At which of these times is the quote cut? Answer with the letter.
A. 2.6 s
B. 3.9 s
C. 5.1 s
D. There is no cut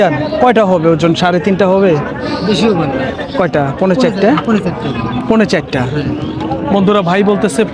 D